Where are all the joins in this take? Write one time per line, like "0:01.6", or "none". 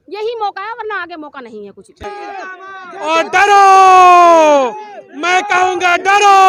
0:02.0